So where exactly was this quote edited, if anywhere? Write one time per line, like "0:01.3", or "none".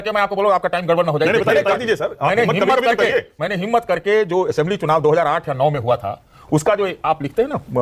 none